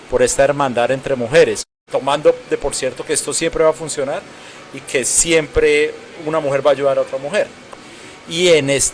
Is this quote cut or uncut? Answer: cut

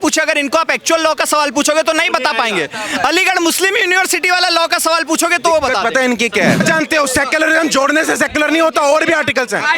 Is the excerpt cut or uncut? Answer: cut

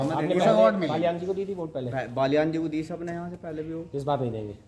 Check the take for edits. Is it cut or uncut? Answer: uncut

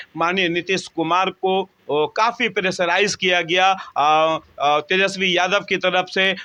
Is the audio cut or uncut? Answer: uncut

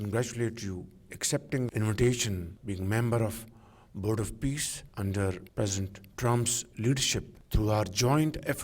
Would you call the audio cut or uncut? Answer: cut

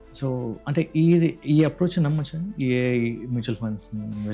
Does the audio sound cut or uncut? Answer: uncut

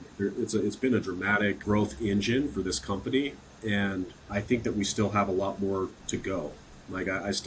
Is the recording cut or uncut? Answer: cut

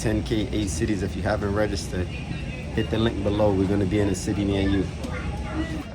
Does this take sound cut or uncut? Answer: uncut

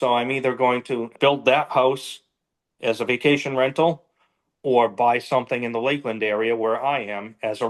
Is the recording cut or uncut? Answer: cut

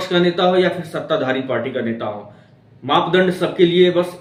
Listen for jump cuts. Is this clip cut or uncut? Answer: uncut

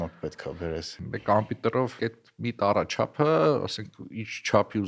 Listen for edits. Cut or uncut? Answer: cut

